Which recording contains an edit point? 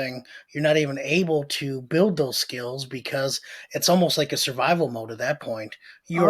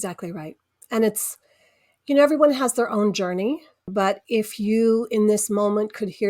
second; 1 cut; at 3.9 s

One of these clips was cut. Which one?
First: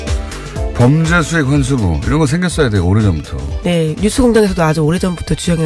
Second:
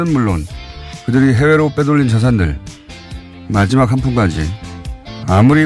second; 1 cut; at 2.0 s

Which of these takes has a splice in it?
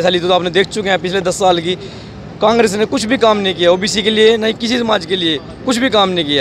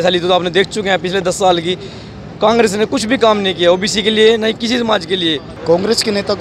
second; 1 cut; at 5.5 s

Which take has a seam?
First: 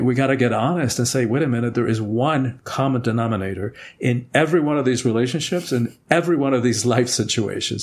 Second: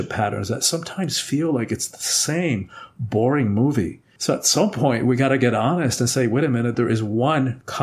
second; 1 cut; at 4.0 s

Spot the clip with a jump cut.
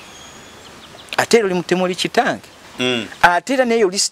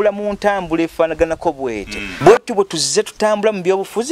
second; 1 cut; at 2.0 s

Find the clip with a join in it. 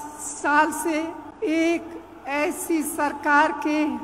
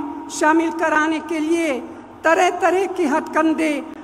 first; 1 cut; at 1.2 s

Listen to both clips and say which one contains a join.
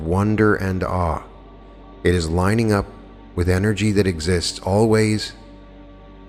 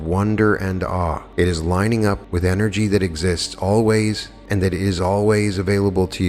second; 3 cuts; at 1.2 s, 2.3 s, 4.3 s

